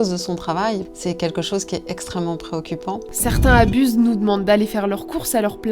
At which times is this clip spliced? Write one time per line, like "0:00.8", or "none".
0:00.9
0:03.1